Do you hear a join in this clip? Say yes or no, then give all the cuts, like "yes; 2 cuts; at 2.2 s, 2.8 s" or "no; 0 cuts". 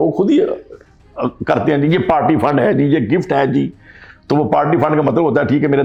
no; 0 cuts